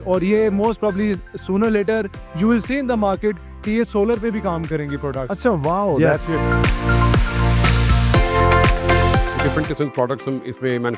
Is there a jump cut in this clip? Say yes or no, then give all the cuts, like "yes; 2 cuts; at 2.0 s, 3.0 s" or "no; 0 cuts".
yes; 1 cut; at 9.4 s